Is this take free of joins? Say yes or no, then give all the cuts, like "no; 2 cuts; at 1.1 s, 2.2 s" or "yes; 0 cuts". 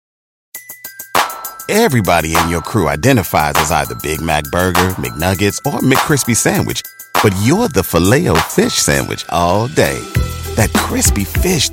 yes; 0 cuts